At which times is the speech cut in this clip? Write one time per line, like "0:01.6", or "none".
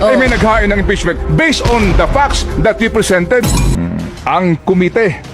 0:03.7